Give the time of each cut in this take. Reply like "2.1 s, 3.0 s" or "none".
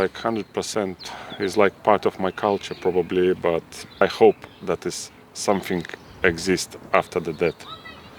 4.0 s

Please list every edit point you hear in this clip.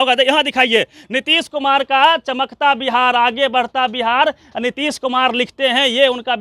none

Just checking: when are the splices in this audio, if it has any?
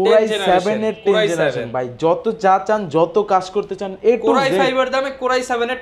none

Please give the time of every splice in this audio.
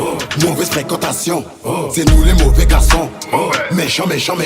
none

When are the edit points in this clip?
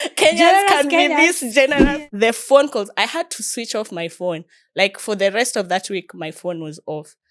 1.8 s

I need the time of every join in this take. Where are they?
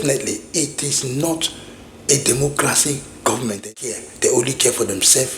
3.6 s

